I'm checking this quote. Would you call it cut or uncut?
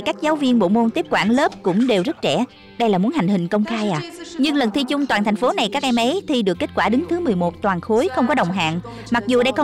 uncut